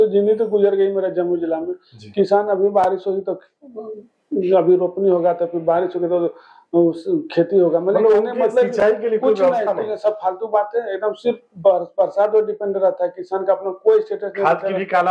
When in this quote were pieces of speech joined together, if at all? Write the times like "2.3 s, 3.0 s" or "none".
none